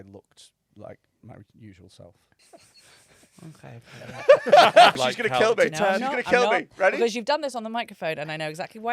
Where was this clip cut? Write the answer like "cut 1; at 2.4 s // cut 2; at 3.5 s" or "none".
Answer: cut 1; at 2.4 s // cut 2; at 4.9 s